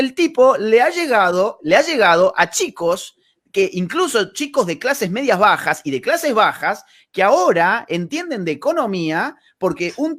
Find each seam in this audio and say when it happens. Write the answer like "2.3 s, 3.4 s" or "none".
none